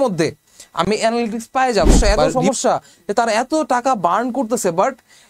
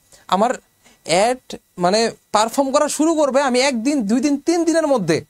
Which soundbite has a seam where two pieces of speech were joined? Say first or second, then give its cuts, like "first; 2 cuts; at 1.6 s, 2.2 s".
first; 1 cut; at 2.3 s